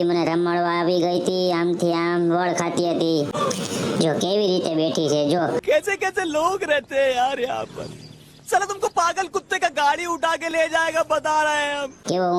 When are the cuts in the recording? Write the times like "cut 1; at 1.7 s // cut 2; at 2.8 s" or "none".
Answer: none

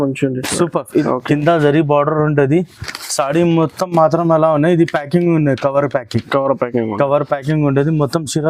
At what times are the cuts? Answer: cut 1; at 1.0 s

